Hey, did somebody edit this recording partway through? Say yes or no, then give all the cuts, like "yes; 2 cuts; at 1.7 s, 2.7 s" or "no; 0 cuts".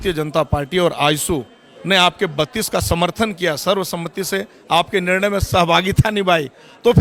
no; 0 cuts